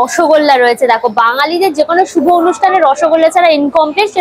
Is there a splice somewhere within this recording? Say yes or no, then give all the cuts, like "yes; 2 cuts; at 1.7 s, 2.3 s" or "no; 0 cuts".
no; 0 cuts